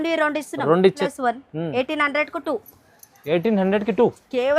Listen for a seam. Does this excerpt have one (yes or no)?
yes